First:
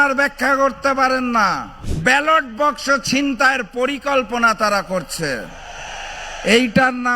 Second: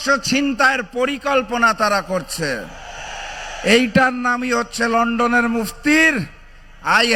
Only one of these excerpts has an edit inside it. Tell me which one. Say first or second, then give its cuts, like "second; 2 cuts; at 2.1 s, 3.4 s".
first; 1 cut; at 1.8 s